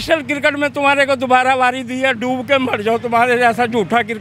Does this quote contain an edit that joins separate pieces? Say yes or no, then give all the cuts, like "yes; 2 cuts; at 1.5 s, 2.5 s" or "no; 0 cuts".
no; 0 cuts